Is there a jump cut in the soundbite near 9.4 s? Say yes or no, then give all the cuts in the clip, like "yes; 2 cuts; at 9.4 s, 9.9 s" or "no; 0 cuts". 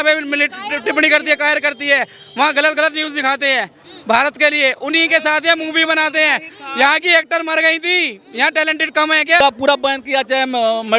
yes; 1 cut; at 9.4 s